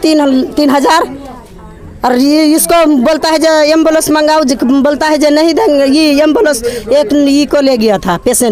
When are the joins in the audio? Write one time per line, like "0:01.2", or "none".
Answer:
none